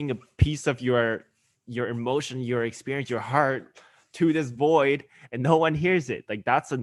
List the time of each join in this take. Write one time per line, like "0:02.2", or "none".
none